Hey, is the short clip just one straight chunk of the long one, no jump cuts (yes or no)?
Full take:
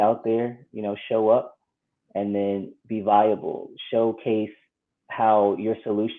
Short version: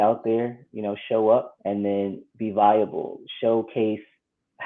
no